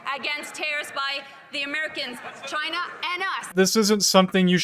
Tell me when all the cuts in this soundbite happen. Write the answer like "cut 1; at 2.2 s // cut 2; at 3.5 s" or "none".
cut 1; at 3.5 s